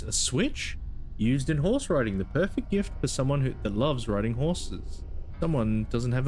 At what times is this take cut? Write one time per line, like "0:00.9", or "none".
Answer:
0:05.2